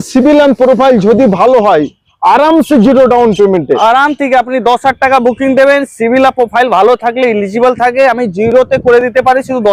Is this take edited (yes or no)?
no